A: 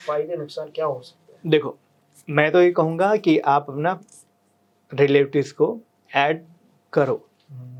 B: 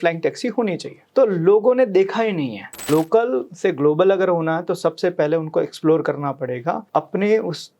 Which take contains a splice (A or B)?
B